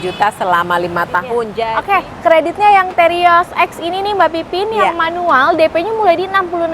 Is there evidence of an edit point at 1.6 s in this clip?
yes; 1 cut; at 1.6 s

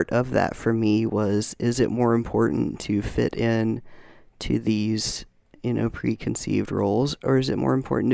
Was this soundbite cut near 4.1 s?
no; 0 cuts

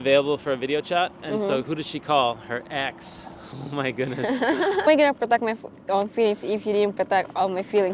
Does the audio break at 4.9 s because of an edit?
yes; 1 cut; at 4.9 s

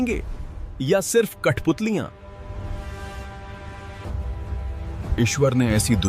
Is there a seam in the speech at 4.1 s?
yes; 1 cut; at 4.1 s

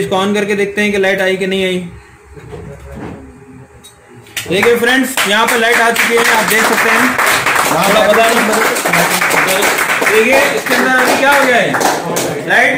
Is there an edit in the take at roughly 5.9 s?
no; 0 cuts

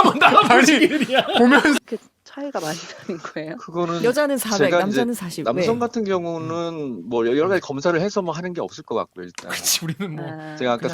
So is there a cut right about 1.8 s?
yes; 1 cut; at 1.8 s

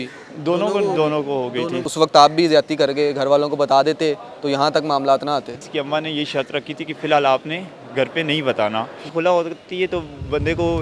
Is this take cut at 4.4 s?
no; 3 cuts; at 1.8 s, 5.7 s, 9.0 s

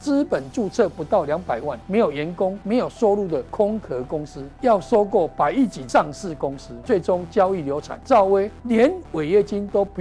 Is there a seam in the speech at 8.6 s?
yes; 8 cuts; at 1.8 s, 2.6 s, 3.5 s, 4.4 s, 5.8 s, 6.7 s, 7.9 s, 8.6 s

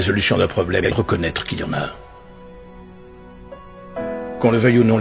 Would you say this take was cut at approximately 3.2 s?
no; 1 cut; at 0.9 s

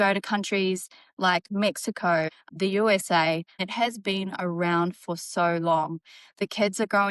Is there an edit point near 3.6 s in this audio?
yes; 2 cuts; at 2.4 s, 3.6 s

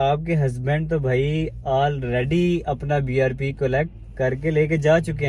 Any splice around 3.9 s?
no; 0 cuts

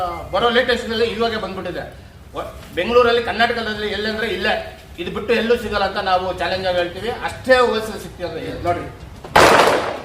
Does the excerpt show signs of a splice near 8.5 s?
yes; 1 cut; at 8.5 s

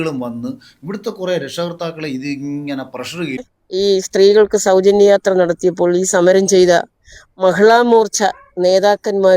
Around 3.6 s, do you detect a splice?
yes; 1 cut; at 3.6 s

